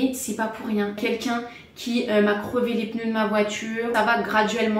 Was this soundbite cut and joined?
yes; 2 cuts; at 1.0 s, 3.9 s

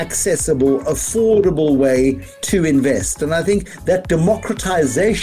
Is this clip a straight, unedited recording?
no; 1 cut; at 2.3 s

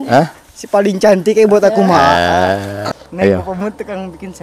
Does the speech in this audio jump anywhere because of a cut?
yes; 1 cut; at 2.8 s

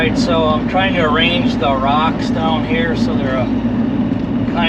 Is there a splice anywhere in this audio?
no; 0 cuts

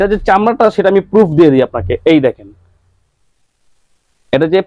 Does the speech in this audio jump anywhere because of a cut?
no; 0 cuts

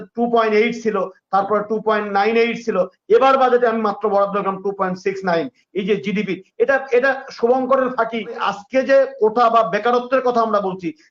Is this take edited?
yes; 1 cut; at 8.5 s

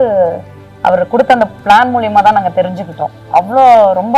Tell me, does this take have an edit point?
no; 0 cuts

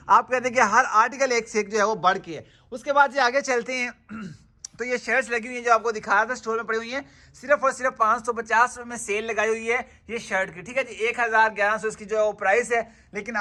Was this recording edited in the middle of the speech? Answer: no; 0 cuts

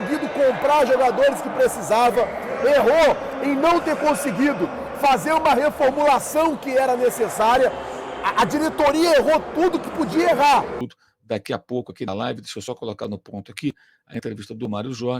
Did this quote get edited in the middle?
yes; 1 cut; at 10.8 s

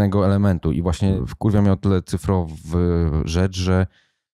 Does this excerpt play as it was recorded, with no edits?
no; 1 cut; at 1.2 s

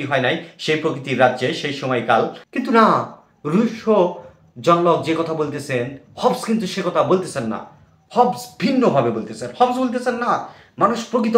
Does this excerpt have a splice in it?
yes; 1 cut; at 2.4 s

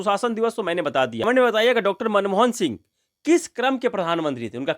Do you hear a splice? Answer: yes; 1 cut; at 1.2 s

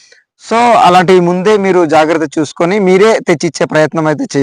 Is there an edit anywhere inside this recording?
no; 0 cuts

